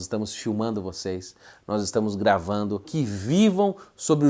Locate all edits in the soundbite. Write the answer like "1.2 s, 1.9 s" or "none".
2.9 s